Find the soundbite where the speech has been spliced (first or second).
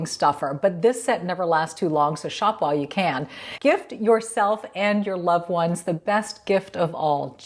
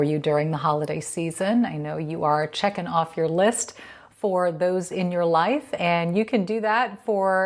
first